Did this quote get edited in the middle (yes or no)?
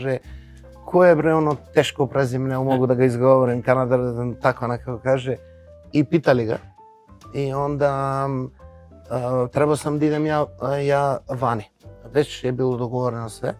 no